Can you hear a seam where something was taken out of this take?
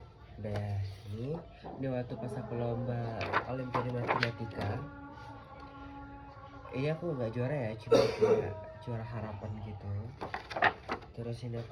no; 0 cuts

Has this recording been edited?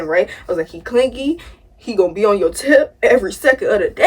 no; 0 cuts

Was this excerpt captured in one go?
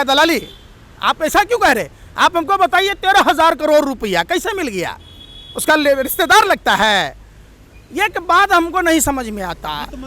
yes; 0 cuts

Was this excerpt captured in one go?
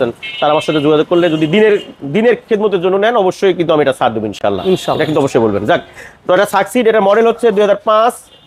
yes; 0 cuts

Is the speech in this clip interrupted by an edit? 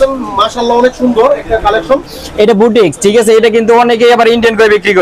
no; 0 cuts

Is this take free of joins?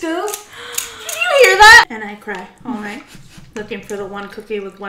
no; 1 cut; at 1.9 s

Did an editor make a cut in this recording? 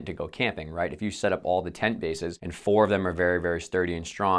no; 0 cuts

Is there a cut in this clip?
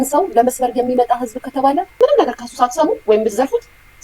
yes; 1 cut; at 1.9 s

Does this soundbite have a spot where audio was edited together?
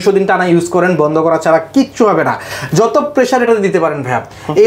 no; 0 cuts

